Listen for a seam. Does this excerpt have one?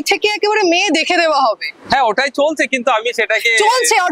no; 0 cuts

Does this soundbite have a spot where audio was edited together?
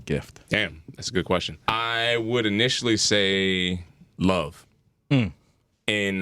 yes; 2 cuts; at 1.5 s, 4.0 s

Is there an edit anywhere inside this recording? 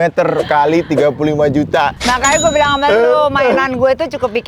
no; 0 cuts

